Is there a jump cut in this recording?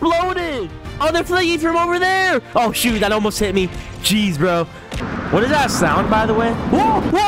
yes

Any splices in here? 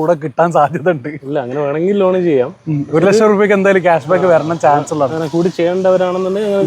no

